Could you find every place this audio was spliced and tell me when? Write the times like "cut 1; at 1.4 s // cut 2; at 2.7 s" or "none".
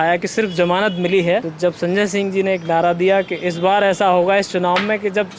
cut 1; at 1.5 s